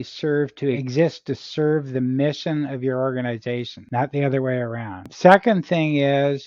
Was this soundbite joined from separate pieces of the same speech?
yes; 3 cuts; at 0.8 s, 3.8 s, 5.1 s

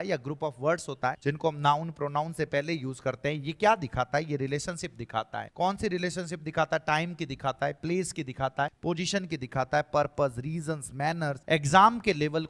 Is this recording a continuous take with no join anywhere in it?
no; 4 cuts; at 1.2 s, 5.4 s, 8.8 s, 11.4 s

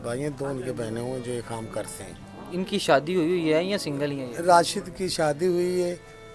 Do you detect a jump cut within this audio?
yes; 1 cut; at 2.3 s

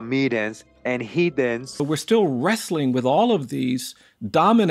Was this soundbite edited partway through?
yes; 1 cut; at 1.8 s

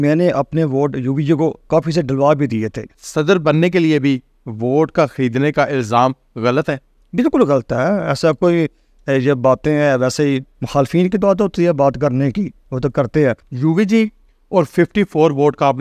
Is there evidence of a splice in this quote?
yes; 2 cuts; at 2.9 s, 13.5 s

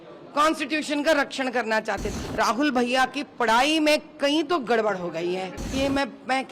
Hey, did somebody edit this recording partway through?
yes; 2 cuts; at 2.1 s, 5.6 s

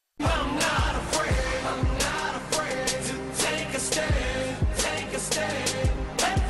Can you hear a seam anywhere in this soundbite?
yes; 1 cut; at 2.5 s

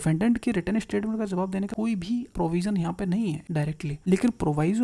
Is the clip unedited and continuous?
no; 2 cuts; at 1.9 s, 3.5 s

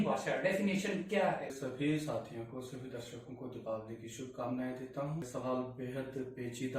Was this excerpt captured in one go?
no; 2 cuts; at 1.6 s, 5.3 s

